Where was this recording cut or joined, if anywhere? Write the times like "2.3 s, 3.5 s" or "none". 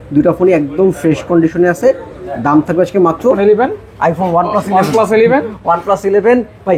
3.4 s